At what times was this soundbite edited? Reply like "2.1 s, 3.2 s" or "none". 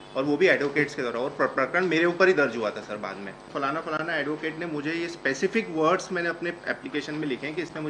3.5 s